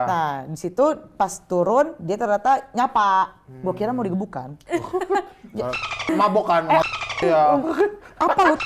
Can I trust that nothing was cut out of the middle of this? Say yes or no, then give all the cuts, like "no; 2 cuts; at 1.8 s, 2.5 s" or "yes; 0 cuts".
yes; 0 cuts